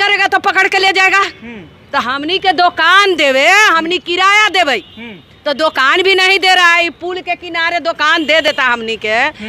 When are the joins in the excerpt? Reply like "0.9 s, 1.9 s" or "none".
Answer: none